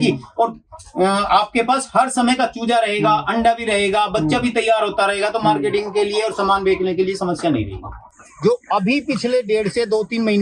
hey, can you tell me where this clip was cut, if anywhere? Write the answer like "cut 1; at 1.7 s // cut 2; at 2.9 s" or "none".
cut 1; at 8.1 s